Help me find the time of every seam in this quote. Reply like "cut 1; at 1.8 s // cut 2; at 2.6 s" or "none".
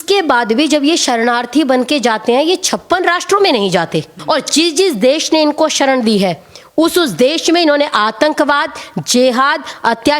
cut 1; at 4.1 s